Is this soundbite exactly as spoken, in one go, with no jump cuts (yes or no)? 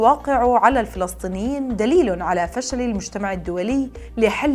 yes